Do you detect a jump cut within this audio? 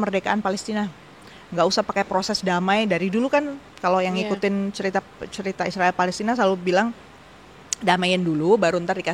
no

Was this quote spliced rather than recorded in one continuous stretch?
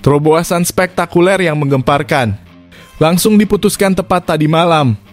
no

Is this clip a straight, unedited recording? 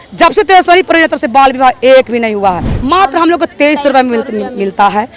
no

